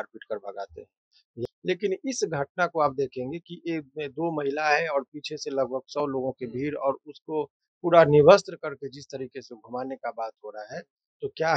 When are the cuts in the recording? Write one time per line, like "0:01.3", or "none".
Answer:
0:01.5